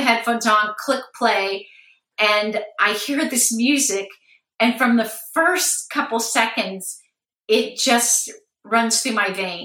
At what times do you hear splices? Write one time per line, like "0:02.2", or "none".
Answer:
none